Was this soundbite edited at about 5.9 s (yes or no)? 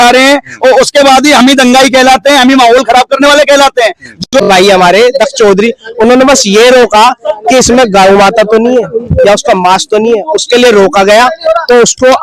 no